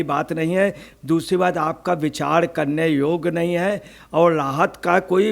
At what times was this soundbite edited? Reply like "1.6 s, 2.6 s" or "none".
none